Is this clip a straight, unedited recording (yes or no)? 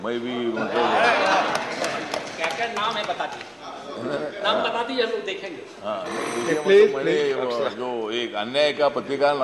yes